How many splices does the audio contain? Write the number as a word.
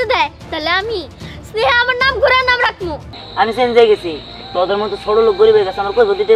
one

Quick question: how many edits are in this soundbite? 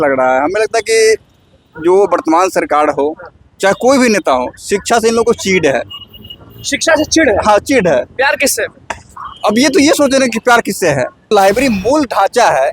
one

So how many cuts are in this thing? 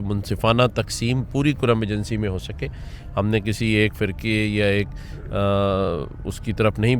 zero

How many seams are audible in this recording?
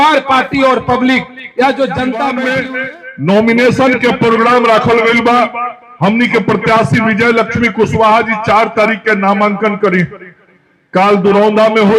one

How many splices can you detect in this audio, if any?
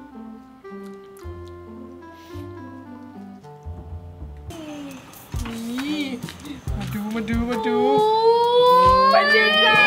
one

